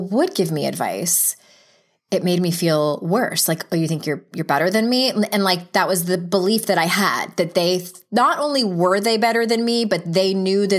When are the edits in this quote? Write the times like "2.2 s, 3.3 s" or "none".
none